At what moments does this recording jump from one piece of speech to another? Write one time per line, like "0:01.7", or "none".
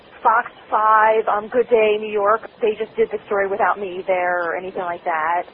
none